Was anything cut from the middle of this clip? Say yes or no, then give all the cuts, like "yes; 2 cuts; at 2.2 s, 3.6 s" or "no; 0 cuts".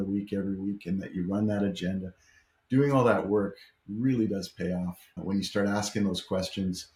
no; 0 cuts